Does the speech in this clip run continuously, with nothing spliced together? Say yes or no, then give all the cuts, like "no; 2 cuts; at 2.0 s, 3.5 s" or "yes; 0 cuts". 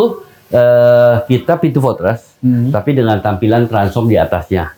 yes; 0 cuts